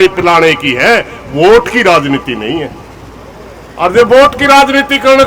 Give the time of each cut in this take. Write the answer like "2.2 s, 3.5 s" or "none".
none